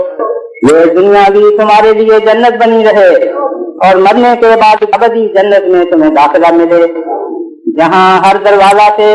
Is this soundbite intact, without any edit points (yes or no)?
no